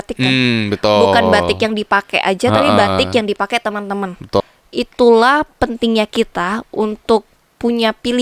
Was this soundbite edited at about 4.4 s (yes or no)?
yes